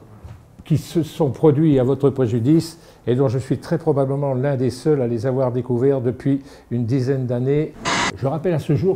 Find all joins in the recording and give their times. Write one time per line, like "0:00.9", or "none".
0:07.8